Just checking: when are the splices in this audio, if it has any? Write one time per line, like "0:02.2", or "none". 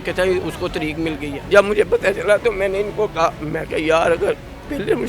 0:01.3